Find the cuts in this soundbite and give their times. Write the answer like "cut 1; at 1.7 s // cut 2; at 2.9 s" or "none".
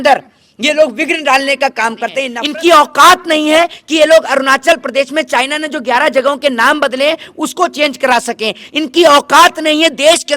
cut 1; at 2.3 s